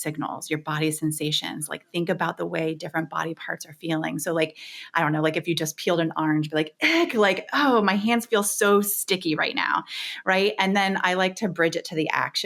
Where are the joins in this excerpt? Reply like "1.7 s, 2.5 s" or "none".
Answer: none